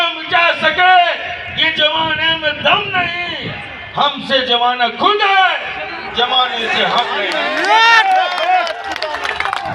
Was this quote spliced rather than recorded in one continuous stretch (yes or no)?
no